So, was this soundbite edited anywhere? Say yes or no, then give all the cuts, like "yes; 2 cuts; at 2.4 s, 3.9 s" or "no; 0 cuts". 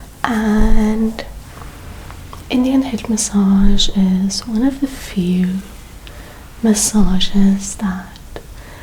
no; 0 cuts